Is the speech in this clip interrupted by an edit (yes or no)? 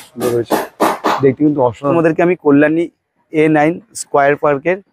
yes